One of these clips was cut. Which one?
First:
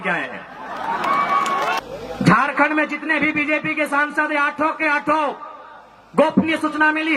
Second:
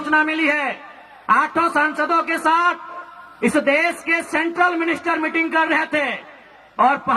first; 1 cut; at 1.8 s

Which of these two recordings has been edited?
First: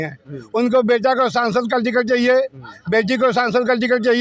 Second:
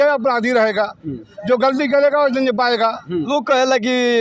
second; 1 cut; at 3.3 s

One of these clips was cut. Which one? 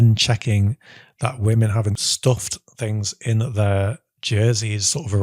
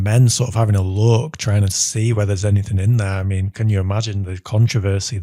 first; 1 cut; at 2.1 s

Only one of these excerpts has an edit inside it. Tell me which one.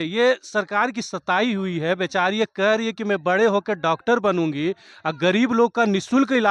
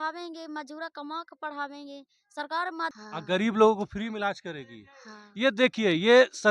second; 1 cut; at 2.9 s

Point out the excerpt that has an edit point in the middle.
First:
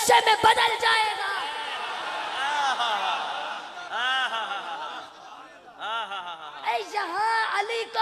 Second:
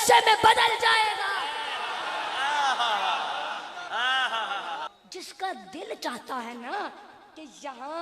second; 1 cut; at 4.9 s

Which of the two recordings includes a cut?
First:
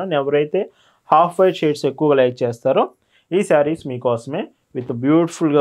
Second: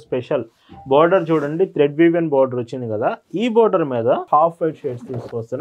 second; 1 cut; at 4.3 s

